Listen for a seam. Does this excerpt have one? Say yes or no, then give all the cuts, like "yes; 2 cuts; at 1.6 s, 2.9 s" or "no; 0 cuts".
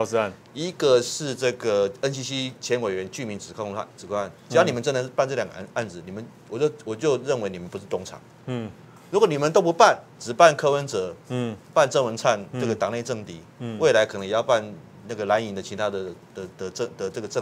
no; 0 cuts